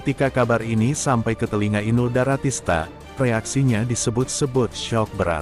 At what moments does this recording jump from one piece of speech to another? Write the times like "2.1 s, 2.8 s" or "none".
none